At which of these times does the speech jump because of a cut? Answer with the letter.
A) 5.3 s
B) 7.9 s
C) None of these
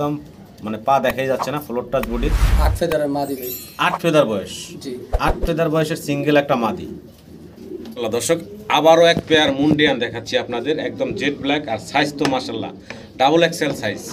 B